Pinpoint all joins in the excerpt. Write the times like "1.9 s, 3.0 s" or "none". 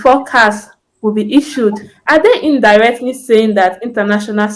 1.9 s